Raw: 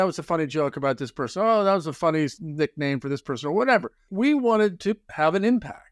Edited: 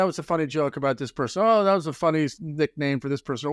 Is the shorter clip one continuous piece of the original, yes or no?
yes